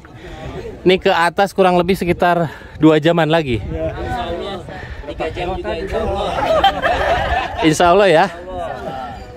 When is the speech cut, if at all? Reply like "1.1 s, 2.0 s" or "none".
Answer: none